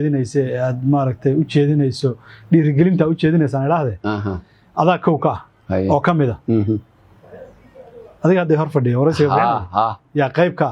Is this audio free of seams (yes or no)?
yes